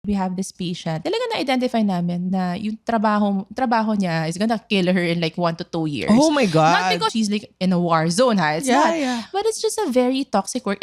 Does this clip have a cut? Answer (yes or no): yes